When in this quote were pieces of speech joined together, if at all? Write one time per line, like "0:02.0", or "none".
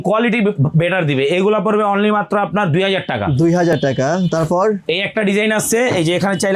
none